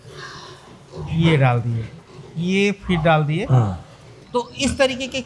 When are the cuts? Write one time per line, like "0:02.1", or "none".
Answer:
0:04.1